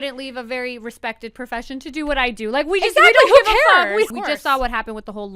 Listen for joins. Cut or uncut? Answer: cut